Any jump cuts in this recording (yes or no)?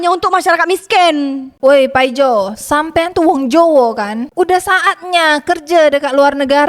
yes